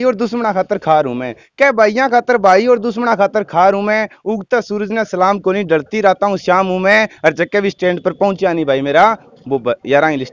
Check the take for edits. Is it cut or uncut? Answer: uncut